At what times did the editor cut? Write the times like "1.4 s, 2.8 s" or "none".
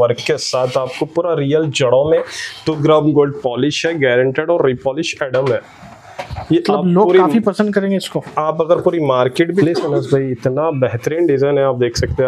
9.6 s